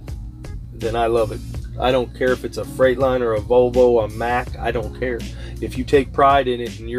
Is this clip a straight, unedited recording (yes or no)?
yes